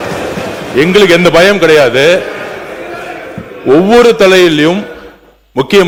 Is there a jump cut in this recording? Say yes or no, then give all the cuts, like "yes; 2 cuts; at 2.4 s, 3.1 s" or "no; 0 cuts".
no; 0 cuts